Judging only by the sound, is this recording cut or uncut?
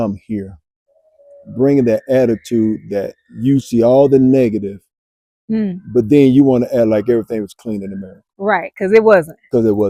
uncut